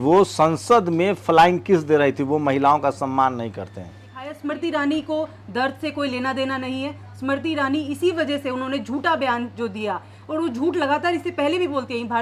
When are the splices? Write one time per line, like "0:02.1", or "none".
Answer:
0:04.3